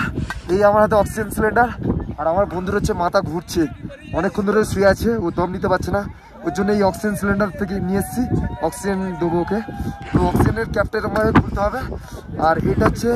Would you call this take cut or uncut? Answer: uncut